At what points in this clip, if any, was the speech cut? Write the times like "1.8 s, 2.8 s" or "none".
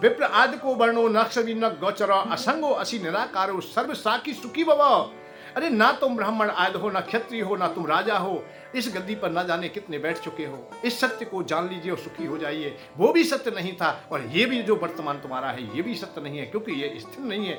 none

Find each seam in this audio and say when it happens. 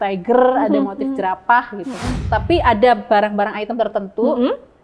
2.2 s

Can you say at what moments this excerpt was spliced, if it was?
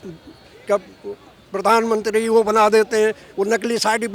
none

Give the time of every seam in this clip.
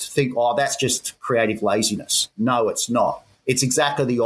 3.3 s

